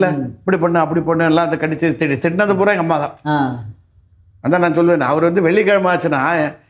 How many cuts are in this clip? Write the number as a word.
zero